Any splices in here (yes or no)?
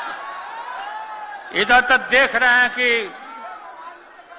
no